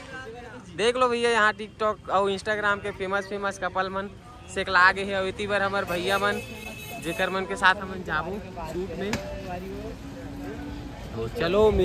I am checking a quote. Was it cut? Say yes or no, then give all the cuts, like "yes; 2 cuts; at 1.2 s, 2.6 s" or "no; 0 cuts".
no; 0 cuts